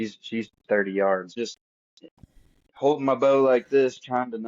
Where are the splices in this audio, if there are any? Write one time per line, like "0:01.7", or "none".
0:01.4